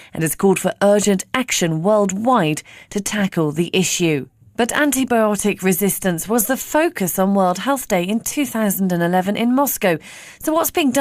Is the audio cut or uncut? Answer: cut